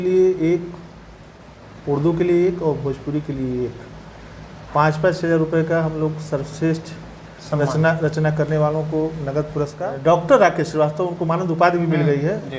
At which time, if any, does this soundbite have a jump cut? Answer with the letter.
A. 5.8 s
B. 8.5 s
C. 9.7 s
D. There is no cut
C